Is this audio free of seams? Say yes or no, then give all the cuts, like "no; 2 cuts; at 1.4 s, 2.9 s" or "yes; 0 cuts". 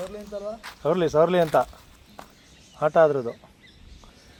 yes; 0 cuts